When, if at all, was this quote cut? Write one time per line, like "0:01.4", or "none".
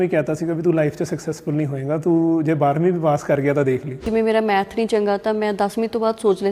0:04.0

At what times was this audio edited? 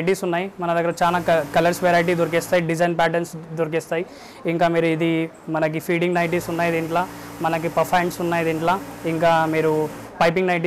none

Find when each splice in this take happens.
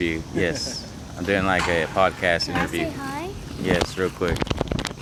none

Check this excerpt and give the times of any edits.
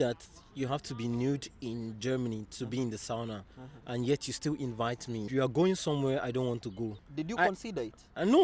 0:05.3
0:07.0

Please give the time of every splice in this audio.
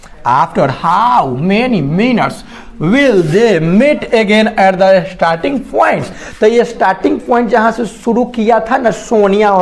none

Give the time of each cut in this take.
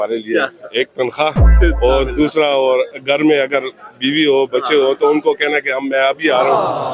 none

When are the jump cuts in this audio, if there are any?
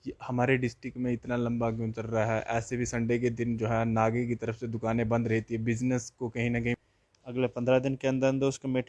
0:06.8

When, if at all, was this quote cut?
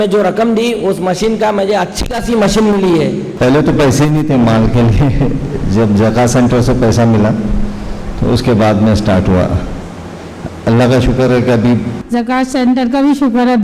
0:03.3
0:12.0

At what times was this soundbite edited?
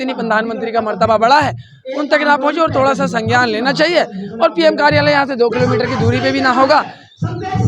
none

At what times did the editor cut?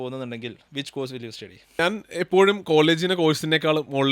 0:01.8

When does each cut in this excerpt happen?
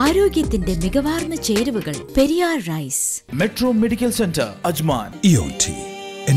0:03.2

